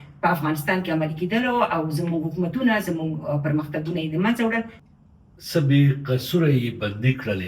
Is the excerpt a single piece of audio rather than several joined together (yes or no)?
no